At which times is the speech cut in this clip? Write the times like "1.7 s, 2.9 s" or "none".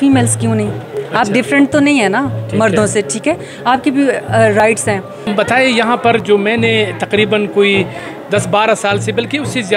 5.2 s